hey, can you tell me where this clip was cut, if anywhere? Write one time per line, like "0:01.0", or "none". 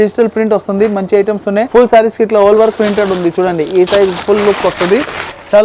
none